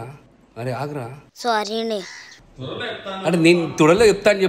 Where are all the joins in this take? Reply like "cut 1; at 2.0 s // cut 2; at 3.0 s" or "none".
none